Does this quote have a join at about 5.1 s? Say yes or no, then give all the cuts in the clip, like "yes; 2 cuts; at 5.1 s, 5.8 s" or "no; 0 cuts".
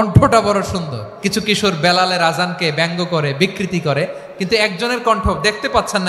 no; 1 cut; at 1.0 s